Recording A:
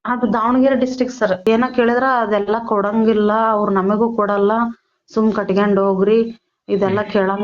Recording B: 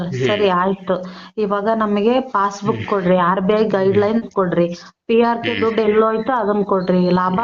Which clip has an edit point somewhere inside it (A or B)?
A